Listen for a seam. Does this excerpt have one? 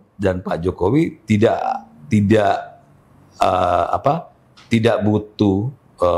no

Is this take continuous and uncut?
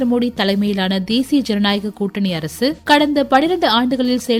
yes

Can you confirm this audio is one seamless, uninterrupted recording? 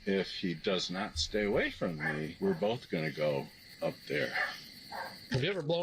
no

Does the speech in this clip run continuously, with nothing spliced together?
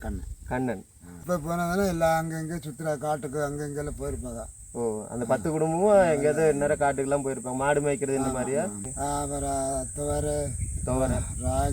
no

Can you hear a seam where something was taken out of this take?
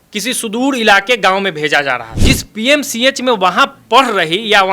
yes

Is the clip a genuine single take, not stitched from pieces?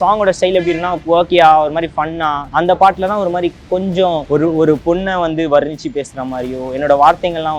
no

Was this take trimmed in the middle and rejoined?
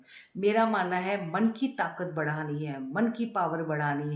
no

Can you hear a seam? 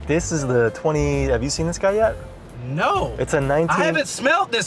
no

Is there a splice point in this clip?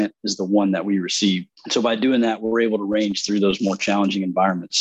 yes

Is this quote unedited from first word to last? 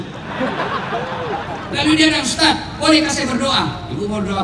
no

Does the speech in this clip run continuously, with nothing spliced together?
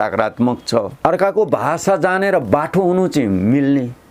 no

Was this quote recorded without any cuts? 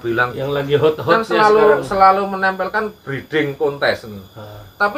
yes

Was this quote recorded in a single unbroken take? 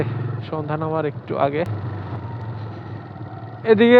no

